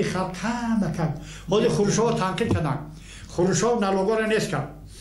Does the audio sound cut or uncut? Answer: uncut